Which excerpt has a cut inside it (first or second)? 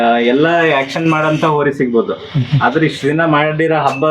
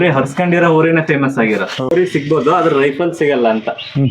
second